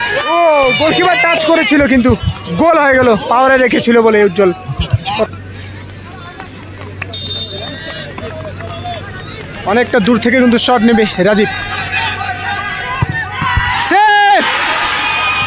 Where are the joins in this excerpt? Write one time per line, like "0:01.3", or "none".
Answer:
0:05.0

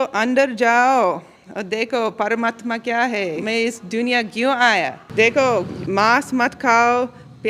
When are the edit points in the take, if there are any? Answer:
0:03.4
0:05.0
0:05.8

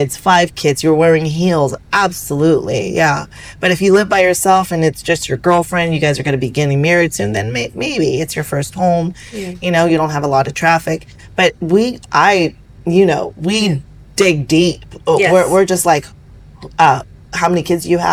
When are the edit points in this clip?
none

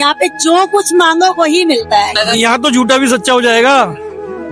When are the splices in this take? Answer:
0:02.1

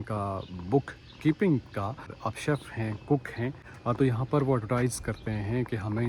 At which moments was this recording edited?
0:02.1
0:03.7

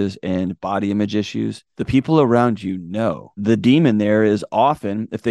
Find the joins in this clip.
0:01.7
0:03.1

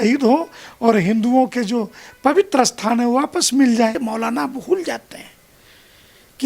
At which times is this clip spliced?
0:04.0

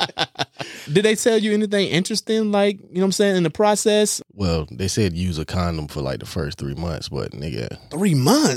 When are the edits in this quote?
0:00.9
0:04.2

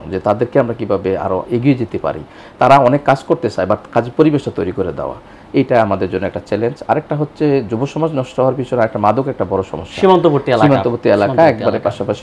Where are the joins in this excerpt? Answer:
none

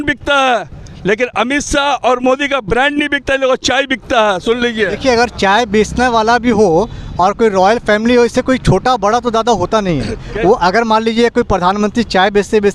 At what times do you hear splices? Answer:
none

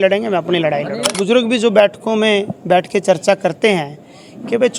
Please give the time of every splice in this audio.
0:01.2

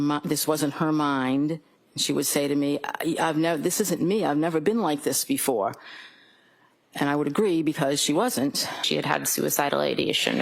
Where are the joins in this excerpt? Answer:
0:08.8

